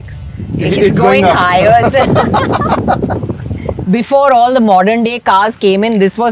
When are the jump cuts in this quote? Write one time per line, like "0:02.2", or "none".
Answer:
0:03.8

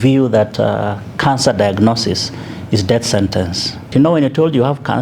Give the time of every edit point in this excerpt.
0:03.9

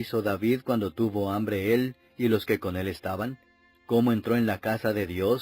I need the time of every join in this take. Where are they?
0:01.9

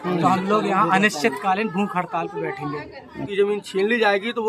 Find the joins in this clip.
0:03.3

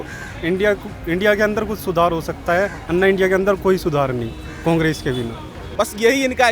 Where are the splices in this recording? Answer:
0:05.6

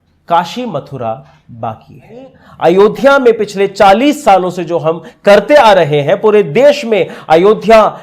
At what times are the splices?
0:02.4

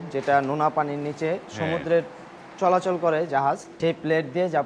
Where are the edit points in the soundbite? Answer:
0:03.7

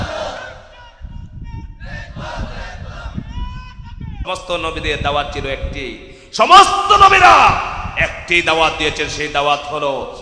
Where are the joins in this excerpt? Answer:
0:04.2

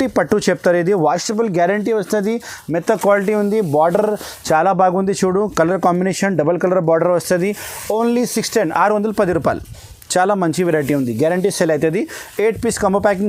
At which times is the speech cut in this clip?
none

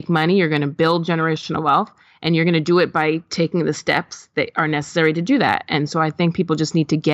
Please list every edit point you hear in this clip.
none

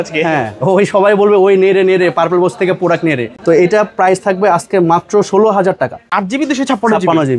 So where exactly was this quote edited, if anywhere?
0:03.3
0:05.9

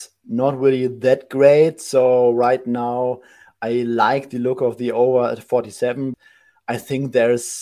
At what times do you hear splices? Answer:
0:06.2

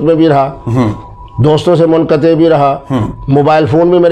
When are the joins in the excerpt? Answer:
none

